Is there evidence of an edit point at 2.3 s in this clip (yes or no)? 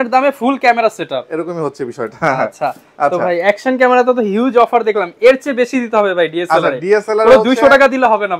no